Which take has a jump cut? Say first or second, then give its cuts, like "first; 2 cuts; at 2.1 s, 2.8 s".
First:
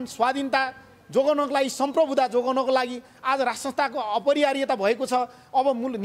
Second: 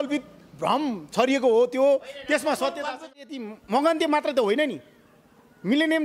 second; 1 cut; at 3.1 s